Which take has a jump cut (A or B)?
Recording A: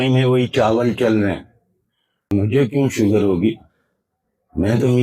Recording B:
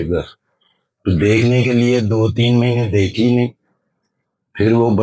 A